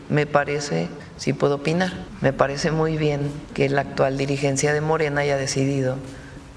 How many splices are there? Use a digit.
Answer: 3